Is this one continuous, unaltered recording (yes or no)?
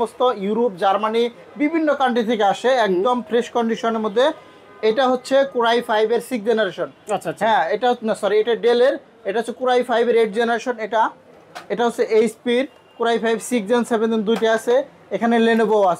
yes